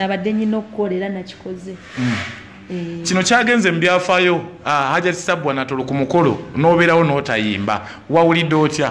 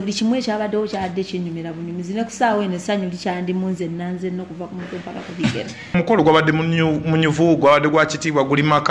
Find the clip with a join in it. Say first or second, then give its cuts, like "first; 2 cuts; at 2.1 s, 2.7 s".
second; 1 cut; at 5.9 s